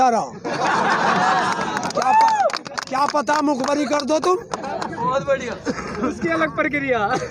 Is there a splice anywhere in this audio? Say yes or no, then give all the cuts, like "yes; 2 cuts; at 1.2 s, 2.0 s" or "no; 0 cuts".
no; 0 cuts